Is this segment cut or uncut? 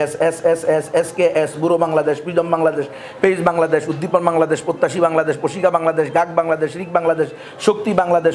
uncut